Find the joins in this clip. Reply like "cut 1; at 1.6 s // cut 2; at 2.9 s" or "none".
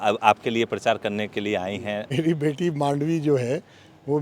cut 1; at 2.1 s

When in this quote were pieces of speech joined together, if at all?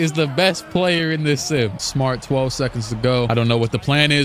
cut 1; at 1.8 s

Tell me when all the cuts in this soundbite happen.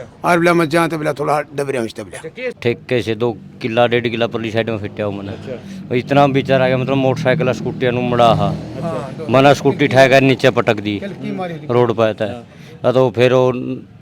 cut 1; at 2.5 s

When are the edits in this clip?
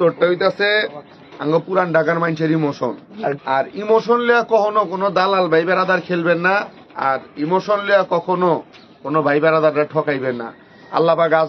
cut 1; at 3.4 s

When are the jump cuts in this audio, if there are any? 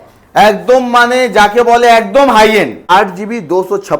cut 1; at 2.9 s

